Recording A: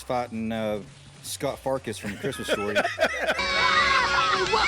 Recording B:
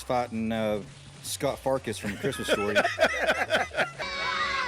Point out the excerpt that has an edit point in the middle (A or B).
A